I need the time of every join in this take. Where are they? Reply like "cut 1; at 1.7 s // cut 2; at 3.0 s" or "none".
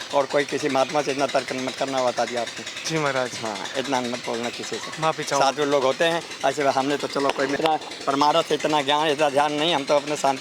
cut 1; at 7.6 s